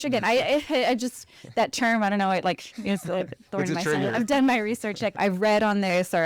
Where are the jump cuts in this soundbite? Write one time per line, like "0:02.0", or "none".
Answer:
0:05.1